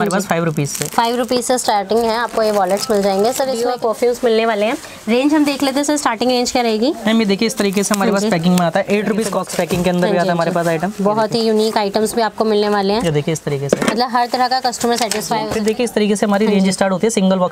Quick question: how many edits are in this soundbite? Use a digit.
3